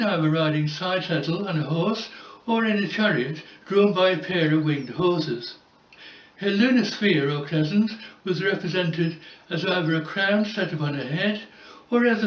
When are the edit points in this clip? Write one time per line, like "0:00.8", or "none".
none

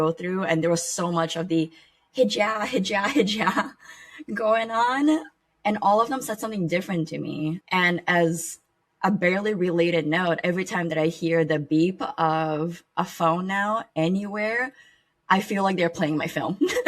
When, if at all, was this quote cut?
0:05.3
0:07.6

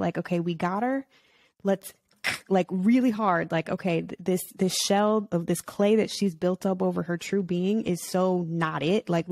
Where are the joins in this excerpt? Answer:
none

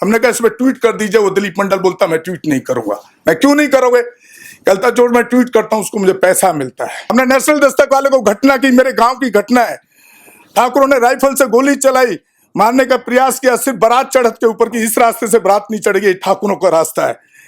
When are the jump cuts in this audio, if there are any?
0:07.1

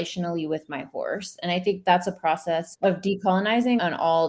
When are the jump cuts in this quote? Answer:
0:02.7

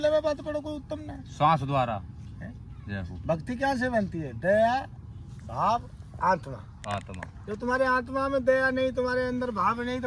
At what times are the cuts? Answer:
none

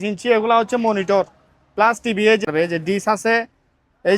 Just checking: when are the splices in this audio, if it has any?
0:02.4

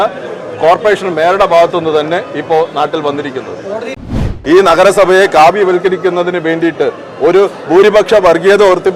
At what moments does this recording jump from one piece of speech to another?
0:04.0

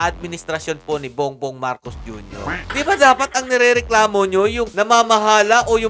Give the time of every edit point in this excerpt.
0:02.6

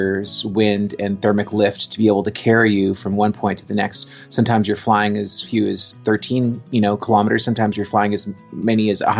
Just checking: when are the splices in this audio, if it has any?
none

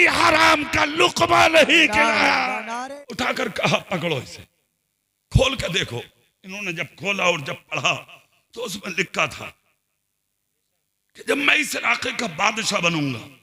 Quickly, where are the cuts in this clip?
0:02.4

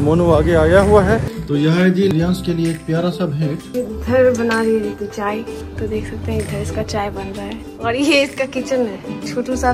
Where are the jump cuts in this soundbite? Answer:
0:01.3
0:03.6
0:05.6
0:07.7

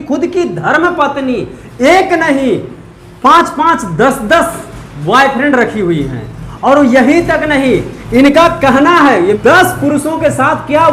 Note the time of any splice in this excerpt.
0:09.4

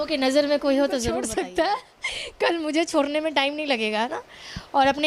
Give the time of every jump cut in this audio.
0:01.2

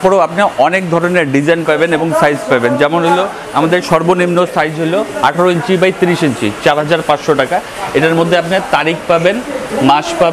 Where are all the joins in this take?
none

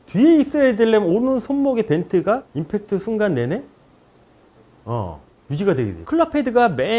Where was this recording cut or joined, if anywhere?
0:06.0

